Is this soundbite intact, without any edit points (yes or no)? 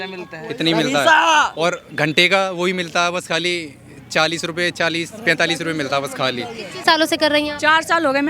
no